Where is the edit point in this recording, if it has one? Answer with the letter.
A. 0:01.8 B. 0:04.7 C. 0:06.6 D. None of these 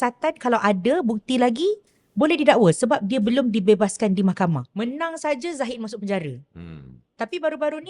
B